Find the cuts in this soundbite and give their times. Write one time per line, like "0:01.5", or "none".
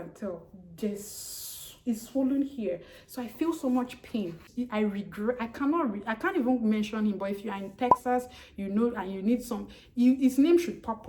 0:04.5

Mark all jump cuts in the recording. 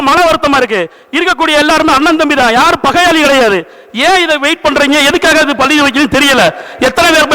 none

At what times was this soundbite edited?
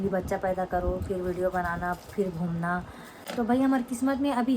none

